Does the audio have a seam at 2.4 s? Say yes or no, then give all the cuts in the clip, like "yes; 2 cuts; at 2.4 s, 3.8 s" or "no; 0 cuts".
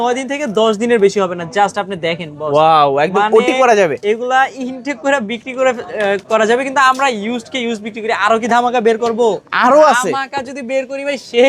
no; 0 cuts